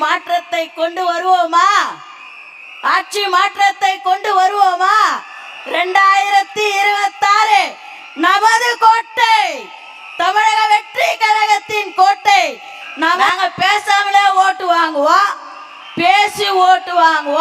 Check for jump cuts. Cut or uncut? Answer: cut